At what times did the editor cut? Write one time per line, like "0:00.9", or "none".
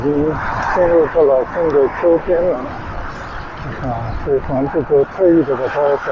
none